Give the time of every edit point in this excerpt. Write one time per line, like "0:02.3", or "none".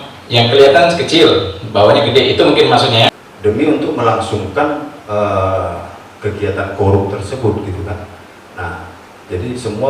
0:03.1